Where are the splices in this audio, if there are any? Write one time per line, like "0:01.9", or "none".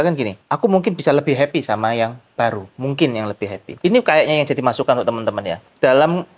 0:03.6